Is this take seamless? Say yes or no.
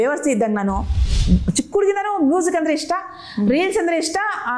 no